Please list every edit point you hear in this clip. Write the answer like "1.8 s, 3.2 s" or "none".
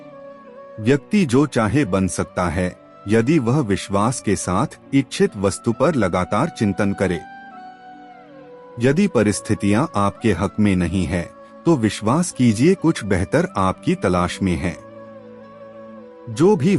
7.4 s, 8.8 s